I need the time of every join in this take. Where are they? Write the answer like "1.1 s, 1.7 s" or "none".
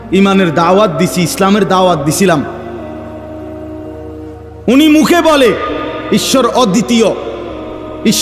2.5 s, 4.1 s